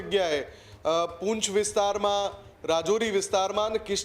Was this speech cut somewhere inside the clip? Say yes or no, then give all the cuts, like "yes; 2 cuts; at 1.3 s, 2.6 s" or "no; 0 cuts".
no; 0 cuts